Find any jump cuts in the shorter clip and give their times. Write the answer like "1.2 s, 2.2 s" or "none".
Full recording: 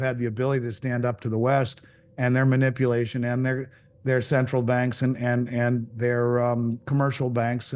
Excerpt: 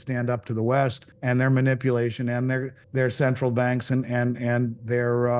1.1 s, 2.8 s